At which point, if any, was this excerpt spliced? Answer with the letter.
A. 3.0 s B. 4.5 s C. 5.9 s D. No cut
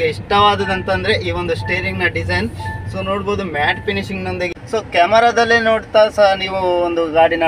B